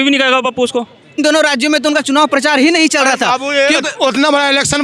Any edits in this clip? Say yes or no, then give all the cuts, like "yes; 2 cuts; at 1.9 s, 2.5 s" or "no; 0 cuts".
yes; 1 cut; at 1.1 s